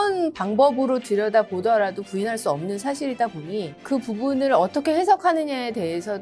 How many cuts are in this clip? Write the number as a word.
one